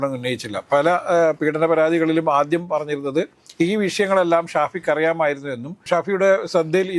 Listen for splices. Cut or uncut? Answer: uncut